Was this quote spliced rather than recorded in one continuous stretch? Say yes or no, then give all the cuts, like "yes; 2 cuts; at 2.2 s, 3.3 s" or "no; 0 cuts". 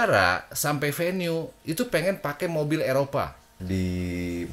yes; 1 cut; at 3.5 s